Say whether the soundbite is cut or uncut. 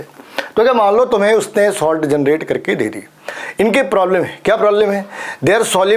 uncut